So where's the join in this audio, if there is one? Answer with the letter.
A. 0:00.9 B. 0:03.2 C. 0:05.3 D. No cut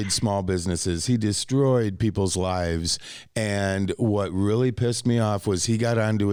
D